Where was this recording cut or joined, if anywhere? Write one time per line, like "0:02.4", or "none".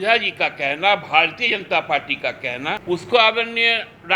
0:02.8